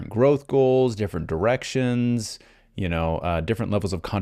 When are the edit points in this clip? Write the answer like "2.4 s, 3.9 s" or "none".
none